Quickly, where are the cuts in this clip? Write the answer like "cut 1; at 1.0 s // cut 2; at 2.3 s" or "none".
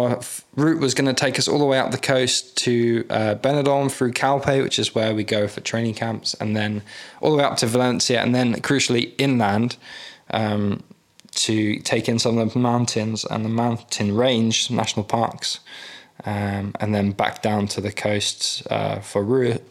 none